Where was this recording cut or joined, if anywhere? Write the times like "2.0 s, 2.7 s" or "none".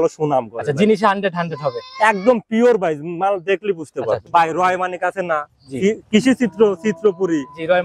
4.2 s